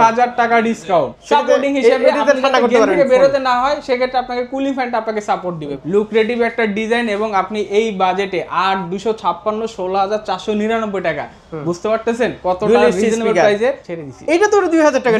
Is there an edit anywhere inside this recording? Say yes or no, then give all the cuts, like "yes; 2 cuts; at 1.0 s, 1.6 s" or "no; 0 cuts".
yes; 3 cuts; at 1.2 s, 5.7 s, 13.9 s